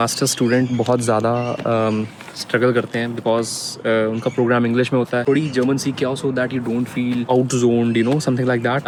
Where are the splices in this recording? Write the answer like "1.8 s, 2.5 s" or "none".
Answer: none